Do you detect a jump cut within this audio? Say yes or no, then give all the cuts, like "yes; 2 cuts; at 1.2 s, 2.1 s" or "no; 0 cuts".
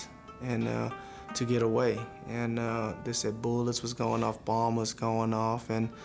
no; 0 cuts